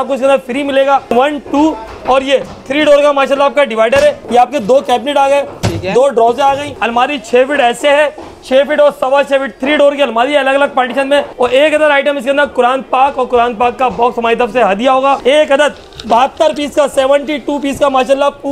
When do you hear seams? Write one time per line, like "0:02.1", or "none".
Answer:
0:01.1
0:04.2
0:06.7
0:11.3
0:15.2